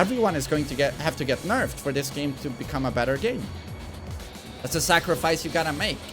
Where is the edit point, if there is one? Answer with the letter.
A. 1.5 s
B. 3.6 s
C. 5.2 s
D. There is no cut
D